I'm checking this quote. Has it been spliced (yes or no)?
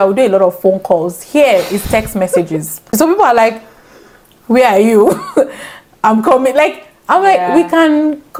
no